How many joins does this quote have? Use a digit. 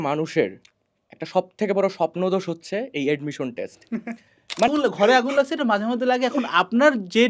1